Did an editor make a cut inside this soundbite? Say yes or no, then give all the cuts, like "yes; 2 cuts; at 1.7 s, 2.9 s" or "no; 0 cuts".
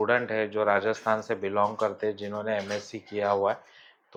no; 0 cuts